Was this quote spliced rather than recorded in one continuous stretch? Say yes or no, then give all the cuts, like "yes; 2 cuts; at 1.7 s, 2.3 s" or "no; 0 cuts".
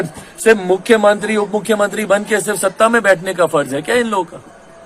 no; 0 cuts